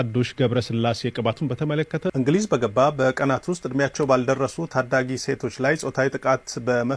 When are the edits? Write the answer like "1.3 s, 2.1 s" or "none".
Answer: 2.1 s